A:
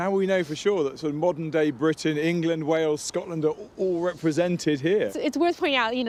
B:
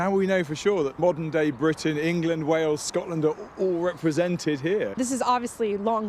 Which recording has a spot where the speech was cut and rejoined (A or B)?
B